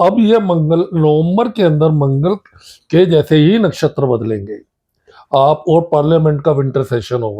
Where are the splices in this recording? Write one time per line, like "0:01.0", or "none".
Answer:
none